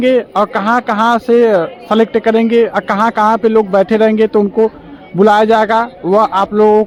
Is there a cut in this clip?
no; 0 cuts

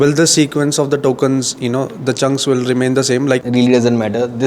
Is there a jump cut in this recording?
yes; 1 cut; at 3.4 s

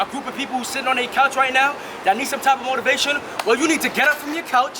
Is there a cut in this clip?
no; 0 cuts

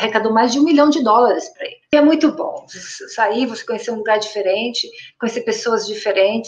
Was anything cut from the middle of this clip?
yes; 1 cut; at 1.9 s

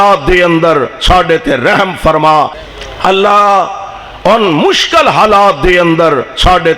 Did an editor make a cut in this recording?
yes; 1 cut; at 2.6 s

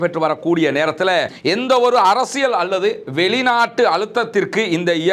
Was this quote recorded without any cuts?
no; 1 cut; at 1.3 s

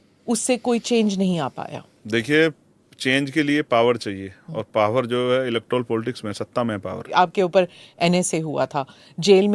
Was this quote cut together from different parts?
yes; 1 cut; at 7.0 s

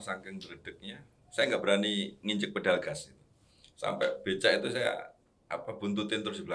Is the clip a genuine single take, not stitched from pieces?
yes; 0 cuts

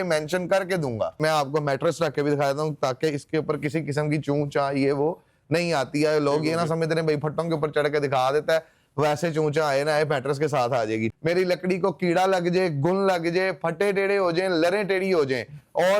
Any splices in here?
yes; 2 cuts; at 1.2 s, 11.1 s

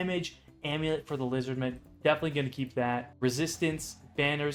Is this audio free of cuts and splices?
yes; 0 cuts

